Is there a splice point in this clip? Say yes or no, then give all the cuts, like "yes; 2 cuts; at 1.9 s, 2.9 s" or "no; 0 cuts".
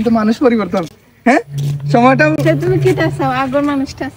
no; 0 cuts